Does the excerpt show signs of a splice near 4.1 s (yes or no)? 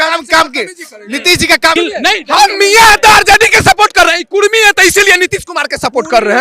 no